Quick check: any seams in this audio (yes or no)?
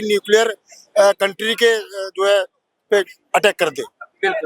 no